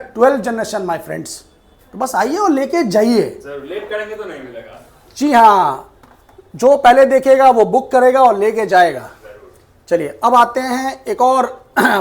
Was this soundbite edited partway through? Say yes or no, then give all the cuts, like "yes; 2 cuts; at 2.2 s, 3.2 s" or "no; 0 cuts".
no; 0 cuts